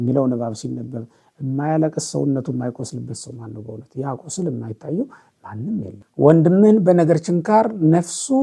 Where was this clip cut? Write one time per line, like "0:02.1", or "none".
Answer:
0:06.0